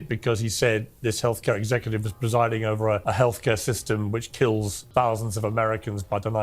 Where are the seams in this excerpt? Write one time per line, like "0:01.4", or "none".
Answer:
0:03.0
0:04.8

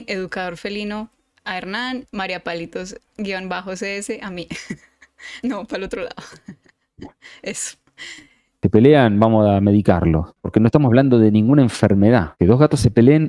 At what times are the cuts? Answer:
0:08.5
0:10.3
0:12.3

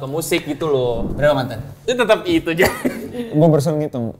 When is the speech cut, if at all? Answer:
0:01.1

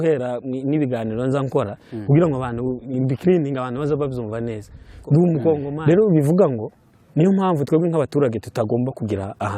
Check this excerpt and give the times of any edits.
0:05.7

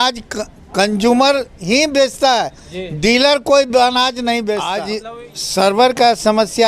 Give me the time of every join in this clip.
0:04.8

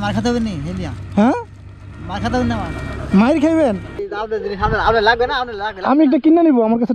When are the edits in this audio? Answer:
0:04.1

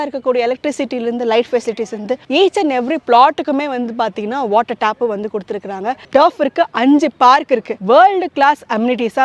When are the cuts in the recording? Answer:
0:02.2
0:06.0
0:07.7

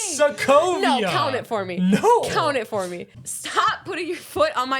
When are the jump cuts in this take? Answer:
0:03.0

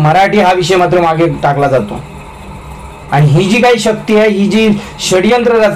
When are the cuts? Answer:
none

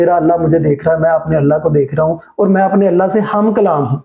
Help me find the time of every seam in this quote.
none

